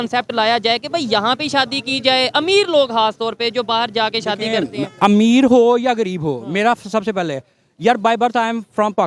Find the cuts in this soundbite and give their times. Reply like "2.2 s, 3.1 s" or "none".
none